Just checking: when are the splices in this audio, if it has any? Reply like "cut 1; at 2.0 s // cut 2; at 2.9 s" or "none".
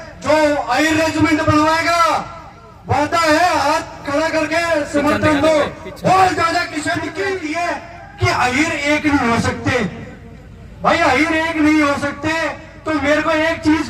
cut 1; at 7.2 s